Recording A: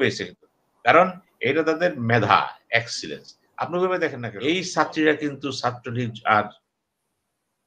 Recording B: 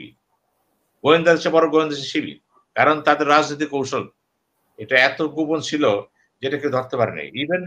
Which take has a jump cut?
A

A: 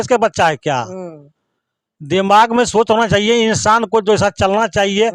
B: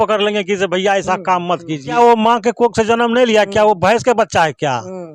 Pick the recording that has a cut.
B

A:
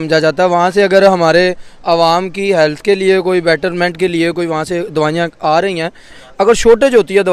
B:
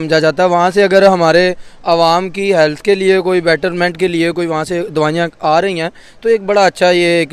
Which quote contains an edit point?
A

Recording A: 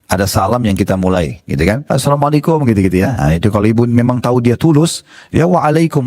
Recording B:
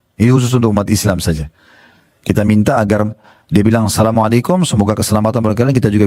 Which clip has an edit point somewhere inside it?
A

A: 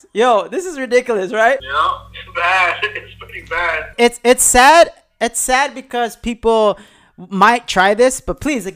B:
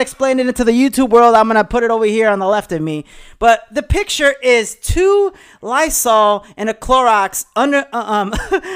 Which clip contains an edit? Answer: A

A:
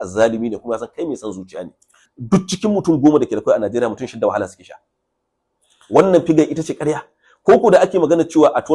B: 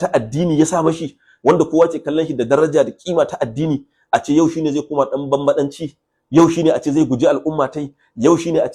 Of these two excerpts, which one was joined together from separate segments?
A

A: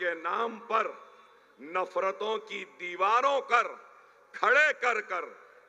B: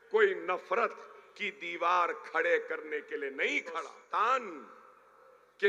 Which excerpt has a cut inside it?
B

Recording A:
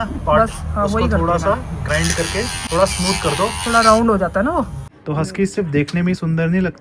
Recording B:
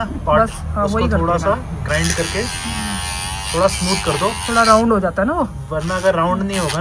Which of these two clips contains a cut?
A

